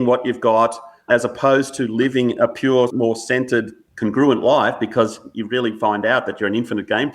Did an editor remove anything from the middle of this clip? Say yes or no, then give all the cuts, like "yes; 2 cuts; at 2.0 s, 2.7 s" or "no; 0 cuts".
yes; 2 cuts; at 2.9 s, 3.8 s